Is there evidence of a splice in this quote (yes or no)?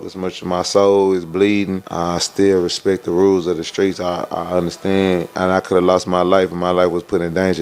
yes